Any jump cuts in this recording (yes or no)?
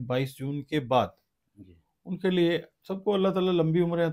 no